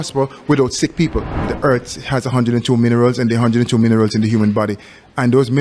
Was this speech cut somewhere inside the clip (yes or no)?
yes